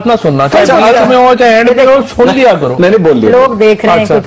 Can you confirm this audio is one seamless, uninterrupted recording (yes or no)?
yes